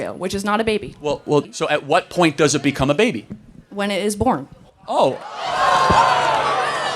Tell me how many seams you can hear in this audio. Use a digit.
1